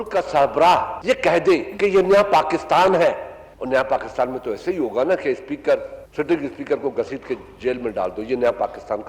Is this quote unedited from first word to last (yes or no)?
no